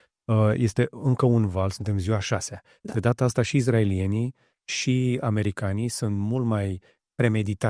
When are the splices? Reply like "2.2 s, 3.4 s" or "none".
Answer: none